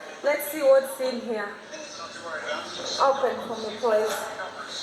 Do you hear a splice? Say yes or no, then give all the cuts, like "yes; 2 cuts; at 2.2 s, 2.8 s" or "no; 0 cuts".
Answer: yes; 1 cut; at 2.9 s